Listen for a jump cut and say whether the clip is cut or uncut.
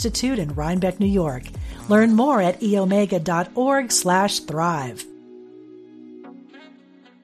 uncut